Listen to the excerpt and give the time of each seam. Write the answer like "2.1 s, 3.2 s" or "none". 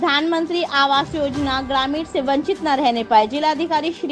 none